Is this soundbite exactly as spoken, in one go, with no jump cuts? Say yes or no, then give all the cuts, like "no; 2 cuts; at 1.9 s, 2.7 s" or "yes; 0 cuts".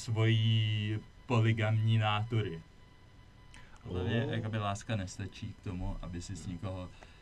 no; 1 cut; at 4.2 s